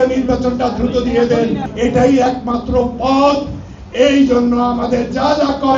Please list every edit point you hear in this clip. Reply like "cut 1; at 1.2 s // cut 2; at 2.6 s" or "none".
cut 1; at 1.6 s

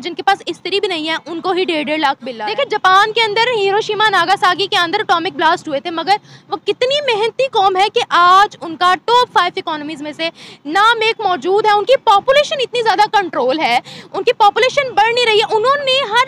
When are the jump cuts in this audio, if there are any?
cut 1; at 2.3 s

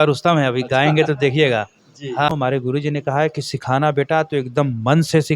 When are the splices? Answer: cut 1; at 2.3 s

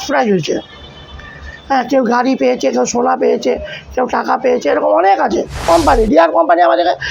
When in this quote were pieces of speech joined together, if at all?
cut 1; at 5.6 s

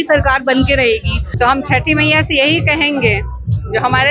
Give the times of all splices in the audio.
cut 1; at 1.2 s

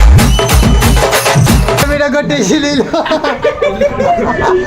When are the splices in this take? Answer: cut 1; at 1.9 s

